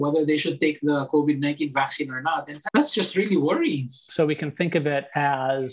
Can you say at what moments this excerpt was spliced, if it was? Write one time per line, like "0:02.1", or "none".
0:02.5
0:04.0